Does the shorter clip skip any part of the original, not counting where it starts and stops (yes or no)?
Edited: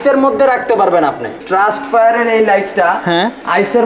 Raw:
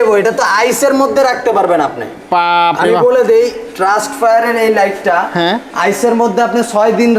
yes